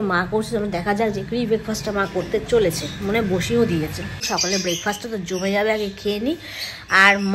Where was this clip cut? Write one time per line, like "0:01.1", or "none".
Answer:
0:04.3